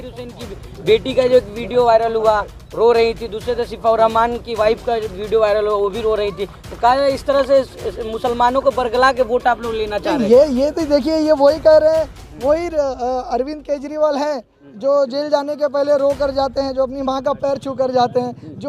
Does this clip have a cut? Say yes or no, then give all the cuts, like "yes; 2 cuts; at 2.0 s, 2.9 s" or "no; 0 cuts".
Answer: no; 0 cuts